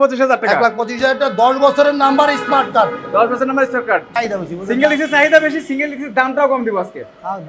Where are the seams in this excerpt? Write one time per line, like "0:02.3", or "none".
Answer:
0:04.1